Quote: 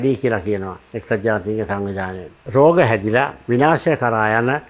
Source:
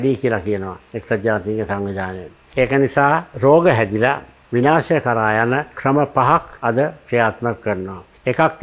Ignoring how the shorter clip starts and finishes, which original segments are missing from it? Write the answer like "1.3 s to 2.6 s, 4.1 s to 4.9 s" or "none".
2.4 s to 3.3 s, 4.3 s to 4.4 s